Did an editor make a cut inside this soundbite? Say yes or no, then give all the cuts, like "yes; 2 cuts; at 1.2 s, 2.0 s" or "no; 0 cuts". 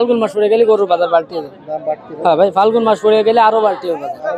no; 0 cuts